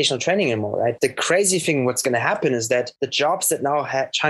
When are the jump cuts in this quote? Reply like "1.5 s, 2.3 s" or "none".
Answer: 0.9 s, 3.0 s